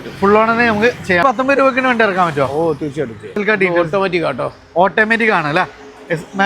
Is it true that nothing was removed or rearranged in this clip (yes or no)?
no